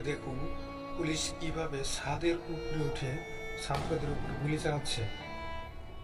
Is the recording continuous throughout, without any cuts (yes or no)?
yes